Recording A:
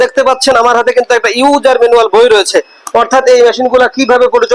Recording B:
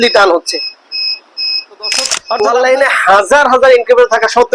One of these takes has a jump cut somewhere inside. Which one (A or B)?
B